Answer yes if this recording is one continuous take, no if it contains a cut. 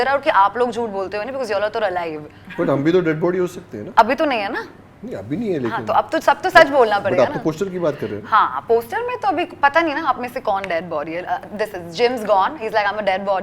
yes